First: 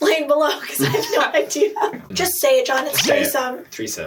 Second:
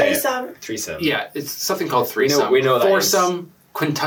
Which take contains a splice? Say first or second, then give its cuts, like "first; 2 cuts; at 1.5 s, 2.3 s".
first; 1 cut; at 2.0 s